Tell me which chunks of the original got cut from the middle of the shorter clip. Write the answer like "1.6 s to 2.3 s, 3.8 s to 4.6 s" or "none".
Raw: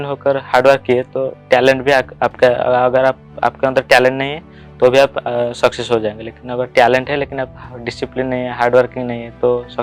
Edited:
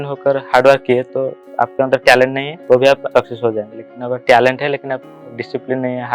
1.4 s to 3.2 s, 4.3 s to 4.6 s, 5.2 s to 5.5 s